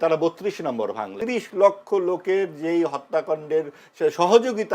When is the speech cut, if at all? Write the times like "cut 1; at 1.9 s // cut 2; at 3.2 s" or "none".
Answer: cut 1; at 1.1 s